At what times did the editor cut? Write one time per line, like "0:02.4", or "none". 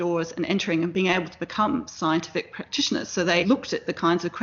0:00.9
0:03.4